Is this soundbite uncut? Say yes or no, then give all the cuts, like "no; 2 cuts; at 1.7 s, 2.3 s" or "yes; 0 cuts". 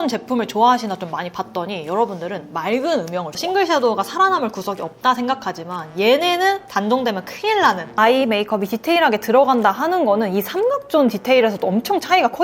no; 2 cuts; at 3.4 s, 7.9 s